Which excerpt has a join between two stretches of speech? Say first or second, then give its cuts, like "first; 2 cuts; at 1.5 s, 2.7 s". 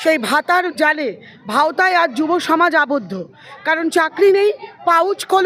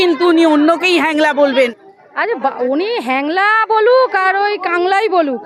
second; 1 cut; at 1.9 s